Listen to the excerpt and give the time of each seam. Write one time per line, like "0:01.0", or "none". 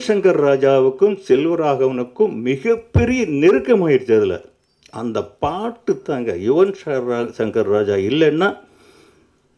none